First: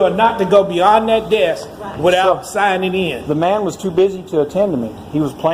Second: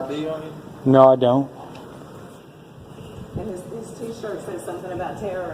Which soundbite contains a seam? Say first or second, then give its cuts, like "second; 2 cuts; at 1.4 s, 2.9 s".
second; 1 cut; at 2.5 s